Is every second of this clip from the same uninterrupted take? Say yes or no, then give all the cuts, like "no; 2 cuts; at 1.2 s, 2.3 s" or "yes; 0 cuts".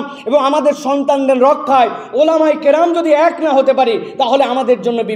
yes; 0 cuts